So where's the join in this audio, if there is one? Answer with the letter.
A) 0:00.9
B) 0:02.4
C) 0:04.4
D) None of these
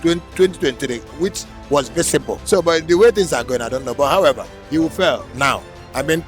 B